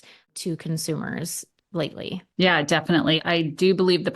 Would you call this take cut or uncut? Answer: cut